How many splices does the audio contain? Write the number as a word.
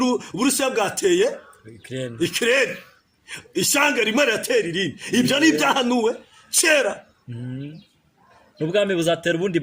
zero